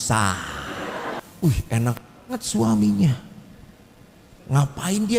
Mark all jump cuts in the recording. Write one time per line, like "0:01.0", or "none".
0:01.2